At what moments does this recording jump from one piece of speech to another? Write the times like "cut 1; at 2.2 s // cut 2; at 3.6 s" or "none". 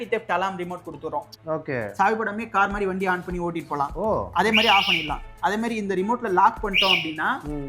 cut 1; at 1.3 s